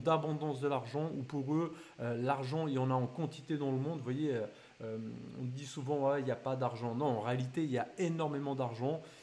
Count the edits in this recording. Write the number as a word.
zero